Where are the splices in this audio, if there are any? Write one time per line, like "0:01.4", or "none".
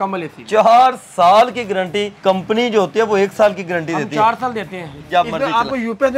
0:02.1
0:05.0